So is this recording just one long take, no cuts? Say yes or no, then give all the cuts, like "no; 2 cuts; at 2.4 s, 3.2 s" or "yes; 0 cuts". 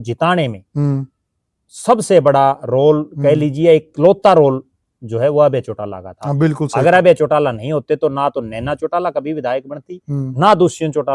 yes; 0 cuts